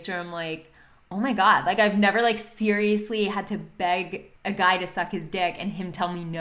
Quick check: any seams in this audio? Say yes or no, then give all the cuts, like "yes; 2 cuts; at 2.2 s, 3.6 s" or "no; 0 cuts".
yes; 1 cut; at 4.3 s